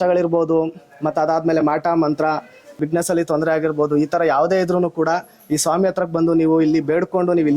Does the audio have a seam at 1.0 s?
no; 1 cut; at 2.8 s

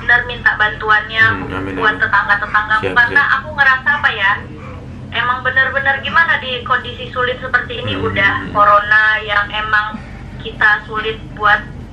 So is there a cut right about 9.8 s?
no; 0 cuts

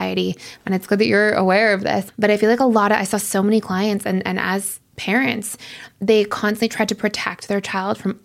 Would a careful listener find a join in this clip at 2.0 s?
yes; 1 cut; at 2.0 s

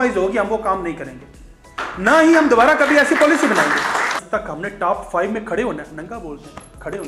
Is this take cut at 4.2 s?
yes; 1 cut; at 4.2 s

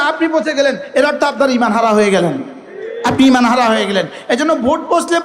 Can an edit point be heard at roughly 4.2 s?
no; 0 cuts

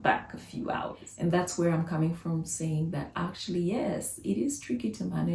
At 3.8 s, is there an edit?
no; 1 cut; at 1.0 s

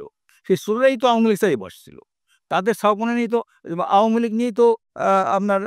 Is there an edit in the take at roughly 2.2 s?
no; 0 cuts

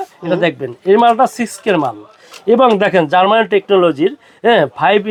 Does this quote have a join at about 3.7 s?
no; 0 cuts

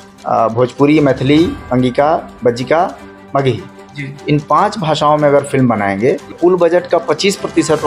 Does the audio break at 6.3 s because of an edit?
yes; 1 cut; at 6.3 s

